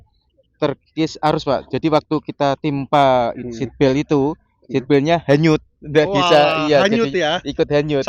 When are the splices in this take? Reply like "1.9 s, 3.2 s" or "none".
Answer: none